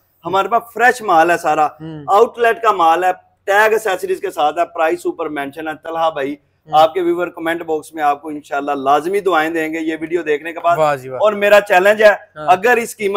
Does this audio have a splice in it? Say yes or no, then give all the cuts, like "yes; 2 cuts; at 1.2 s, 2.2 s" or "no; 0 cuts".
no; 0 cuts